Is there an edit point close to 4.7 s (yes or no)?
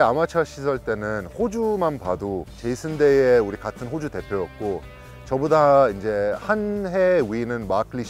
no